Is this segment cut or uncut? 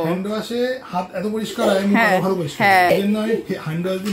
cut